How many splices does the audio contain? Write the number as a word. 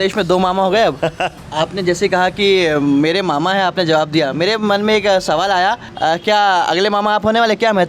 two